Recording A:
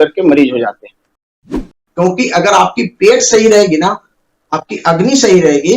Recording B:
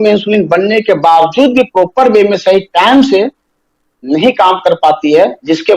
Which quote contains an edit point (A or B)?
A